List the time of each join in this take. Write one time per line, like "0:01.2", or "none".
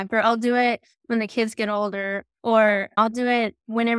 0:02.3
0:03.0

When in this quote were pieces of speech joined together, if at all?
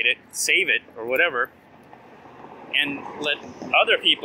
none

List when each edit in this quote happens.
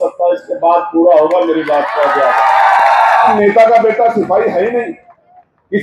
0:03.3

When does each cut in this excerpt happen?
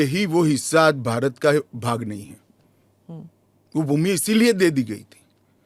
none

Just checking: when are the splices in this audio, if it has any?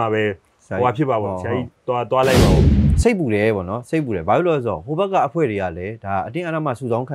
0:02.7

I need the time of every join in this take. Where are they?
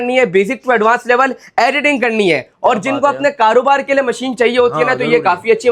none

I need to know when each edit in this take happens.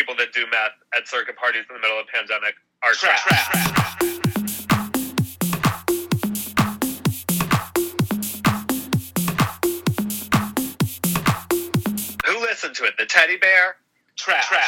none

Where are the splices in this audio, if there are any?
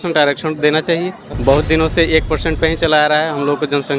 0:01.3

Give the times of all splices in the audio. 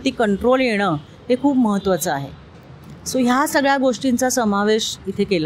none

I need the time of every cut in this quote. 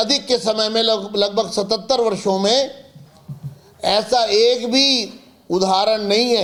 none

